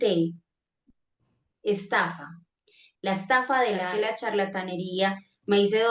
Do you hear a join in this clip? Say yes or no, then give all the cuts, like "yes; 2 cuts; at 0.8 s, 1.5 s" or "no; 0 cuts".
yes; 1 cut; at 3.9 s